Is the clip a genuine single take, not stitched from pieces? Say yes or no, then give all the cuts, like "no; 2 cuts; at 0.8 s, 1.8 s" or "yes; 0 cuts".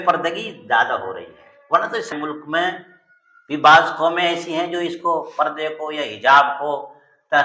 no; 1 cut; at 2.1 s